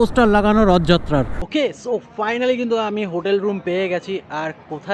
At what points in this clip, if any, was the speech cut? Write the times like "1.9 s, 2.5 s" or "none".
1.3 s

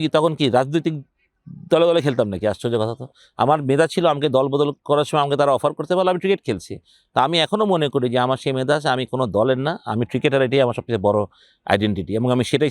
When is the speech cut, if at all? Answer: none

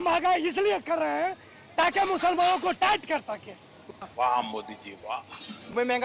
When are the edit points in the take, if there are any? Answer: none

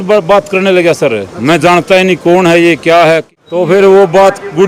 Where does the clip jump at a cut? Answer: 3.3 s

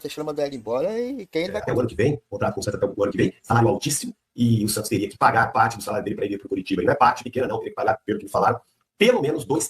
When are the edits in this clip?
1.6 s

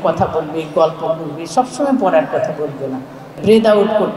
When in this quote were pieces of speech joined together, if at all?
3.2 s

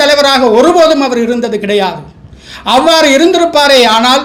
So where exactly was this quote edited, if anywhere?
none

